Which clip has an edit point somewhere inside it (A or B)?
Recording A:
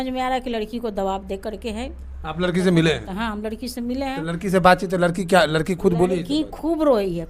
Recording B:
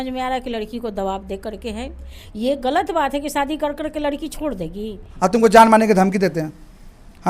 B